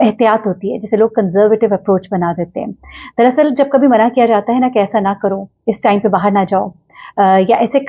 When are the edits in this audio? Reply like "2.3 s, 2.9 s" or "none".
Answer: 3.2 s